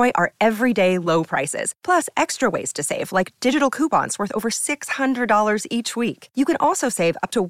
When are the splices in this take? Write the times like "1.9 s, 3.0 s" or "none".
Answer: none